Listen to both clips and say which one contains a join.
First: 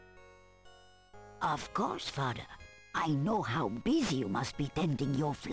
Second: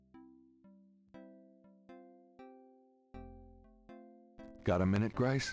second; 1 cut; at 4.6 s

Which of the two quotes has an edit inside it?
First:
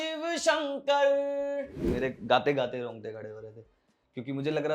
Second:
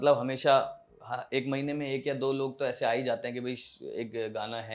first; 1 cut; at 1.8 s

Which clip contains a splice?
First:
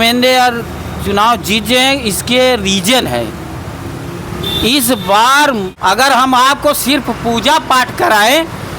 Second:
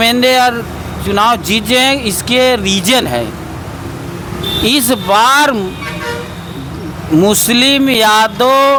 first; 1 cut; at 5.7 s

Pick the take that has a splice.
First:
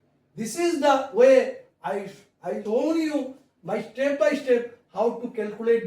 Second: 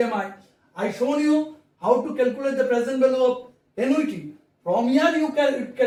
first; 1 cut; at 2.6 s

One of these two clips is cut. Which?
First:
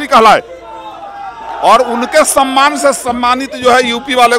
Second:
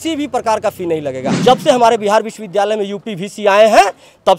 second; 1 cut; at 1.3 s

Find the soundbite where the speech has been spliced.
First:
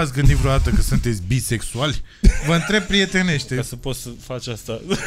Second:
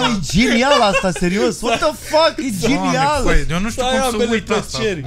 first; 1 cut; at 3.6 s

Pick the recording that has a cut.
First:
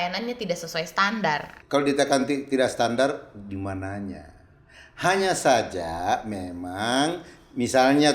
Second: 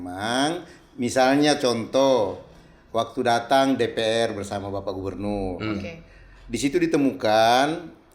first; 1 cut; at 1.5 s

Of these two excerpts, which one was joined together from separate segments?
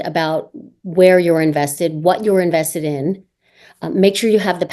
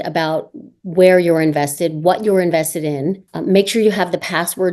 second; 1 cut; at 3.3 s

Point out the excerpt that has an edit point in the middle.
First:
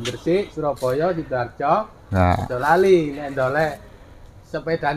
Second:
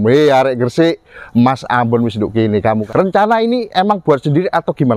second; 1 cut; at 2.8 s

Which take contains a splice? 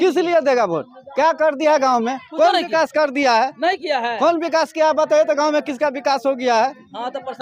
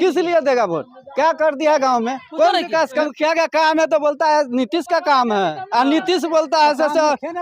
second; 1 cut; at 2.9 s

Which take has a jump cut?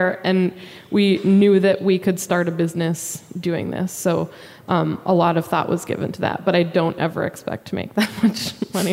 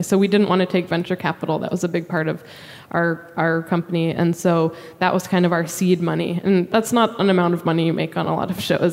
second; 1 cut; at 6.7 s

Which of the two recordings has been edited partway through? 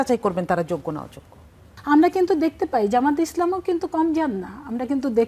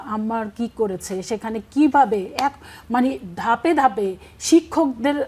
first; 1 cut; at 1.7 s

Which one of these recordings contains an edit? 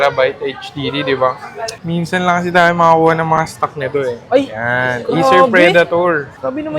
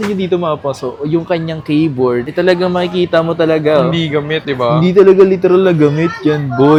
first; 1 cut; at 1.7 s

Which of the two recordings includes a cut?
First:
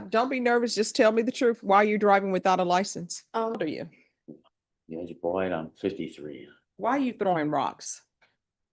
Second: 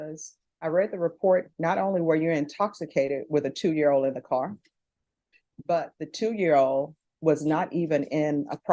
first; 1 cut; at 3.6 s

